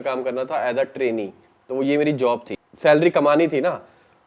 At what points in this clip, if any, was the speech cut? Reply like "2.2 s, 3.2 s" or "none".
2.5 s